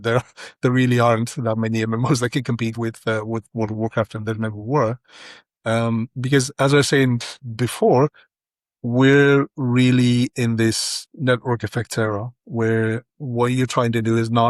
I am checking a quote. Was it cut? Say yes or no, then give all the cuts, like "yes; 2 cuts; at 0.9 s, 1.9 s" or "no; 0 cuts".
no; 0 cuts